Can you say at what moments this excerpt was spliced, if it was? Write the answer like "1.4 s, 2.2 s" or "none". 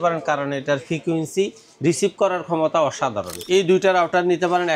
3.4 s